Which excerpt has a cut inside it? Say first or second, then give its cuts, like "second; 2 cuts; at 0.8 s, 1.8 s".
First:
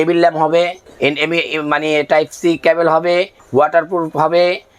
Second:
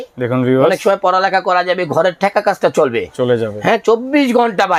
first; 1 cut; at 3.4 s